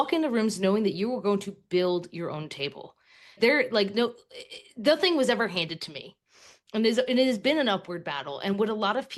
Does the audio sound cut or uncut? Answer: uncut